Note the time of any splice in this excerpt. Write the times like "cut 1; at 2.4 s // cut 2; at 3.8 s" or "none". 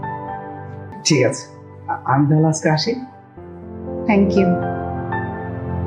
cut 1; at 0.9 s